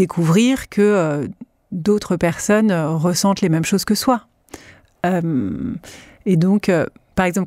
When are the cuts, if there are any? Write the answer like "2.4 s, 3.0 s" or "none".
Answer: none